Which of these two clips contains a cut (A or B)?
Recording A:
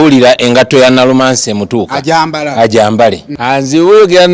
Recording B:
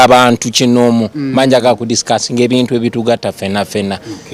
A